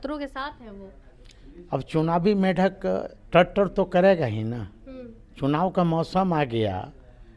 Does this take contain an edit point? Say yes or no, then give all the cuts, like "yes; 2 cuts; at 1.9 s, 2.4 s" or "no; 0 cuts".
yes; 1 cut; at 3.1 s